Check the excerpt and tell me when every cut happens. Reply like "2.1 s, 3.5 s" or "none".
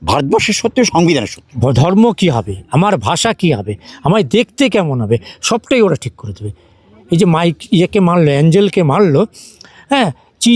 1.4 s